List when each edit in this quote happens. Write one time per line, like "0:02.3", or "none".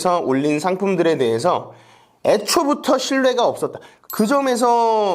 0:04.0